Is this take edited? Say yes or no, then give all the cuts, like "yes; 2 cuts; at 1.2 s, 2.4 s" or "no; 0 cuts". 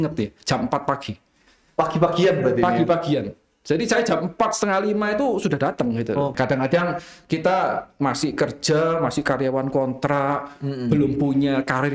yes; 1 cut; at 6.3 s